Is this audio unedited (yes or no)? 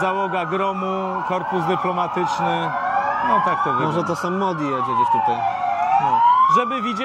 yes